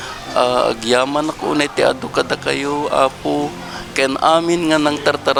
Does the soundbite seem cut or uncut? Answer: uncut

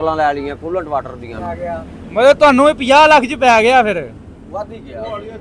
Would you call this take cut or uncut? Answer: cut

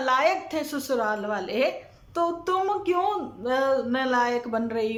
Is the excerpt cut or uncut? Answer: uncut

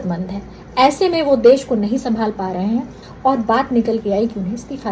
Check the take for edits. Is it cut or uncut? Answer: cut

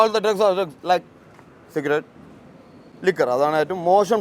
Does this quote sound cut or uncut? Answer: uncut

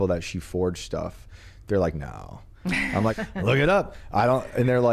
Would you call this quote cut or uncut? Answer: cut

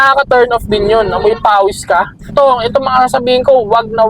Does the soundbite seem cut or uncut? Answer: cut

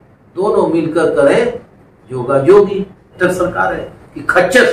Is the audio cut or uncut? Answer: cut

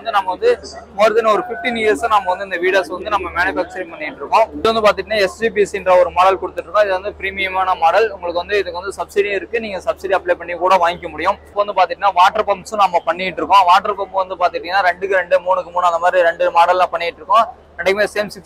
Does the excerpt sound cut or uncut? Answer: cut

